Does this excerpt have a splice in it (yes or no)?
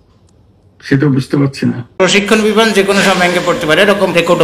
yes